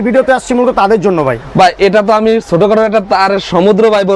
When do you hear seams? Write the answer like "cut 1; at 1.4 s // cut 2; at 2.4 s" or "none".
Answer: none